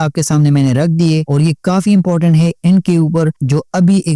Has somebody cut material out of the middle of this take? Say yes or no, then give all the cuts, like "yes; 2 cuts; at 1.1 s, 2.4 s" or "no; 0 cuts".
yes; 1 cut; at 1.3 s